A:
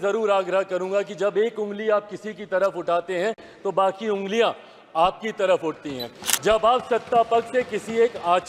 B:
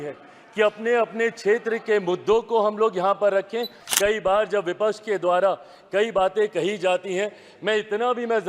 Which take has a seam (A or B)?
B